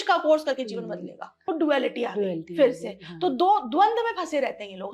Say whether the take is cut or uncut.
cut